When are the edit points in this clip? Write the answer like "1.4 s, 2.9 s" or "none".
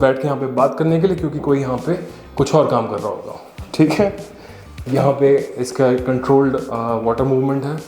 none